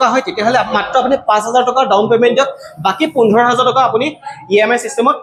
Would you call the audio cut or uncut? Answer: uncut